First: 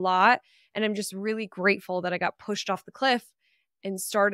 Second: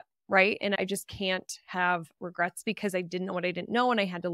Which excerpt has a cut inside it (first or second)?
second